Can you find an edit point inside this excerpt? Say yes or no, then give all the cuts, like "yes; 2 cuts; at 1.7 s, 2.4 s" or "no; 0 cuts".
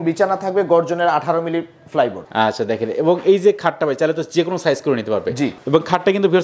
no; 0 cuts